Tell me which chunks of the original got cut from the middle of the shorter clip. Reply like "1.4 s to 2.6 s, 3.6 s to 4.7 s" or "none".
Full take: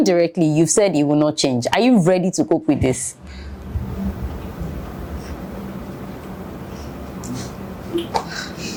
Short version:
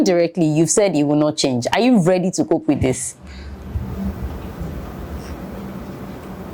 none